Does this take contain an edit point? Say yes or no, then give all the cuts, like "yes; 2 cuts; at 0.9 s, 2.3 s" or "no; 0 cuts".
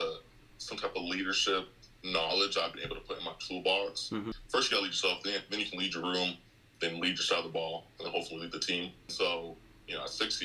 yes; 2 cuts; at 4.4 s, 9.1 s